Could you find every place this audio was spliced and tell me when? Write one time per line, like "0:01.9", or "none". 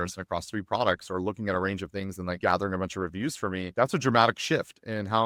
none